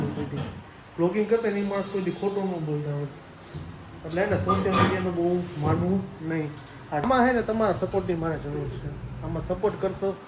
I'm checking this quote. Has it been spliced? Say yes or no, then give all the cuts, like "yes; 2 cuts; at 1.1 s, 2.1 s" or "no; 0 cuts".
yes; 1 cut; at 7.0 s